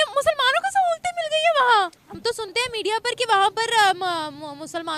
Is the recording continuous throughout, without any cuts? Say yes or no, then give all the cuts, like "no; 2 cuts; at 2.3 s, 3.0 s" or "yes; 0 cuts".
no; 1 cut; at 2.1 s